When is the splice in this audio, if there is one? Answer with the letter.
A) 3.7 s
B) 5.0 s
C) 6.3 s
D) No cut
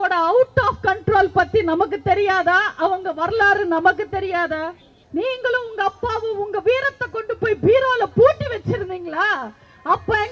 B